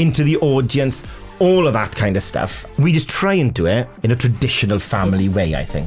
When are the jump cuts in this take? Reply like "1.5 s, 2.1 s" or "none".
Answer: 2.6 s, 3.9 s

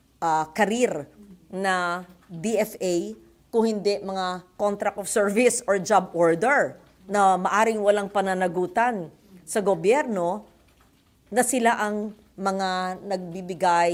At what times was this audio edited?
none

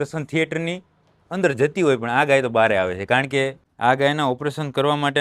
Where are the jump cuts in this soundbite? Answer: 3.6 s

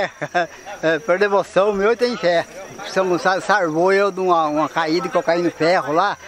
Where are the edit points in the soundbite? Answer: 2.8 s

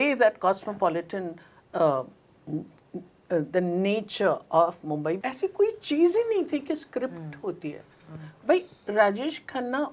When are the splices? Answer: 5.2 s

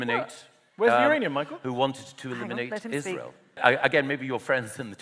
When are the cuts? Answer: 3.6 s

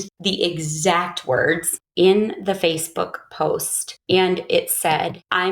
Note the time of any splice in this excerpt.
1.8 s

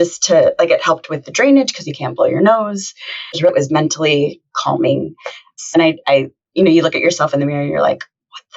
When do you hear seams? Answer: 3.5 s, 5.7 s

